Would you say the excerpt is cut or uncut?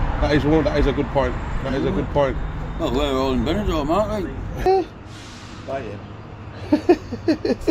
cut